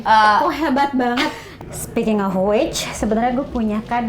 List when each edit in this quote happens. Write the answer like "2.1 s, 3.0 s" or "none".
1.4 s